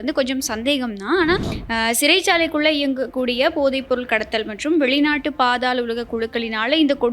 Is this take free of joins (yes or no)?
no